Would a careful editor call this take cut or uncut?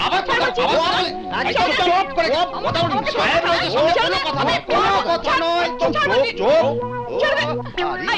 uncut